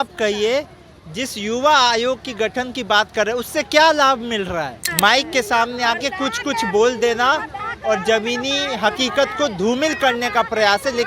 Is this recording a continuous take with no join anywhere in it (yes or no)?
no